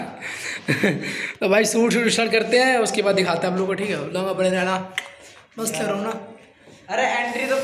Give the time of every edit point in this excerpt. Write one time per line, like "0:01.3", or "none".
none